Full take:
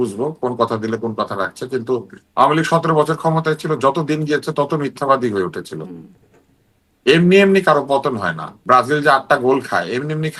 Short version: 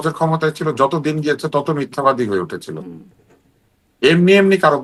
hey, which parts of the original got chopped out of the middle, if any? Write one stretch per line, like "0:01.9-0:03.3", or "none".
none